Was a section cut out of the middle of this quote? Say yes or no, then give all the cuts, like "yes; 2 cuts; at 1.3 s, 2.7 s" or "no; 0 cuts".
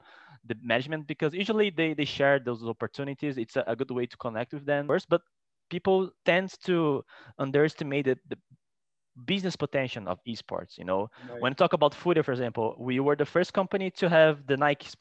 yes; 1 cut; at 4.9 s